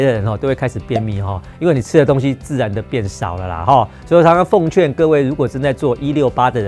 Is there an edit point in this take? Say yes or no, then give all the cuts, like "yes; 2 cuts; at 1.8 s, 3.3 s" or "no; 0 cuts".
no; 0 cuts